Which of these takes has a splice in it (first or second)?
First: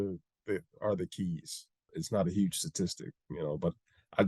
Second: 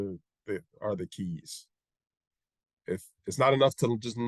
first